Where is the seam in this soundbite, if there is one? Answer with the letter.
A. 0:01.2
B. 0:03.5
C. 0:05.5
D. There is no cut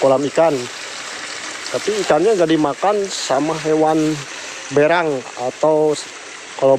D